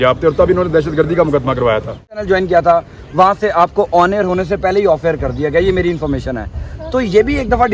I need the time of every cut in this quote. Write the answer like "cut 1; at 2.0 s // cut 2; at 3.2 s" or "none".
cut 1; at 2.2 s